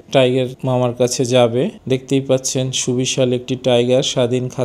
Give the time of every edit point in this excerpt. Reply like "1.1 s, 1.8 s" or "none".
1.8 s